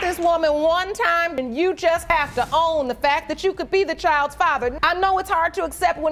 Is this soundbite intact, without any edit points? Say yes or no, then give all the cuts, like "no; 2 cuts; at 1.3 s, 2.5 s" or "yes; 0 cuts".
yes; 0 cuts